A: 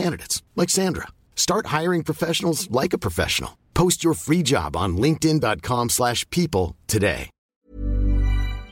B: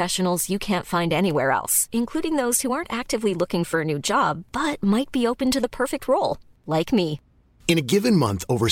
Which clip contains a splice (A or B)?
A